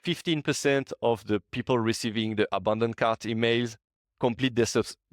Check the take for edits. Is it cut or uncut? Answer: uncut